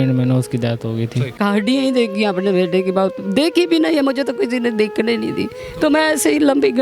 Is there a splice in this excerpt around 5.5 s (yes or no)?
yes